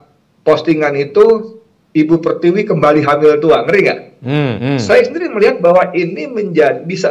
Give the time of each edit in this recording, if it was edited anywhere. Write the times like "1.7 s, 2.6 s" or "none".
4.6 s